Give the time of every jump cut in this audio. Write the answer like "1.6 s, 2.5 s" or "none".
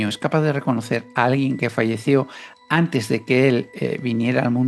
none